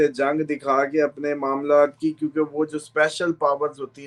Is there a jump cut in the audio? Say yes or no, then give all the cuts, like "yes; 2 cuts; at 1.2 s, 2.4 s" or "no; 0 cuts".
no; 0 cuts